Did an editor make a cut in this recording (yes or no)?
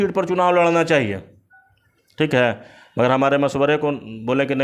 no